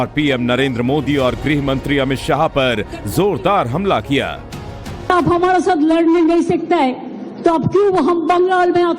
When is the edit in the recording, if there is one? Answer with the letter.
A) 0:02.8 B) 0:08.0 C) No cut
B